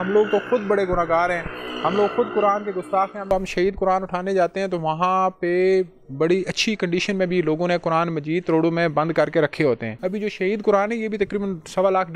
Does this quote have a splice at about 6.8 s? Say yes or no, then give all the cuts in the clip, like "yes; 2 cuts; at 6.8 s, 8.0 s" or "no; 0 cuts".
no; 2 cuts; at 3.3 s, 9.9 s